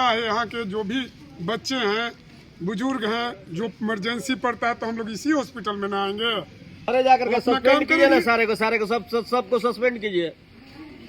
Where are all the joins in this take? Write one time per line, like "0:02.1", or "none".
0:06.9

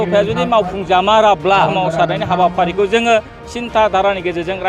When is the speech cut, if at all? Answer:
0:01.7

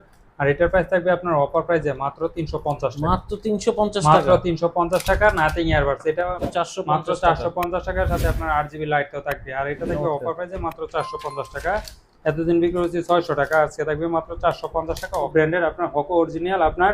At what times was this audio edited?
0:06.4
0:15.3

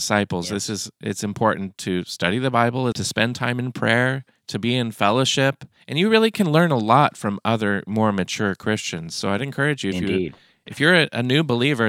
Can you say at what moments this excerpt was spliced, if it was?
0:03.0

